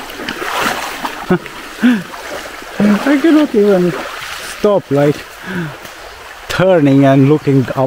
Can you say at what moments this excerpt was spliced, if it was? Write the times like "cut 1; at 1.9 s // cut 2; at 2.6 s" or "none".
cut 1; at 1.2 s